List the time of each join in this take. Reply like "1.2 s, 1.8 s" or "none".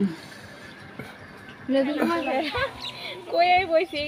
2.2 s